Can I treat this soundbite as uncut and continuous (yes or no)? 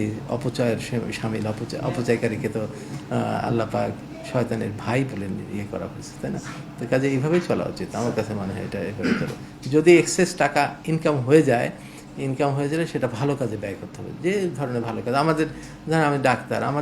yes